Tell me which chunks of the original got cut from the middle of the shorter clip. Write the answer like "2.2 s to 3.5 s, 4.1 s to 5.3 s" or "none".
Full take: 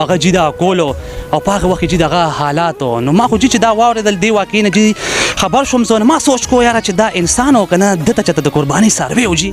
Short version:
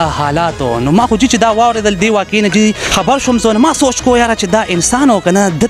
5.1 s to 5.3 s